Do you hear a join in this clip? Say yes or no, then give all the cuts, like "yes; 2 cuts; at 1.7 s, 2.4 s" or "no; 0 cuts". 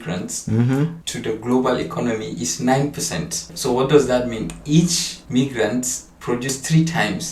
no; 0 cuts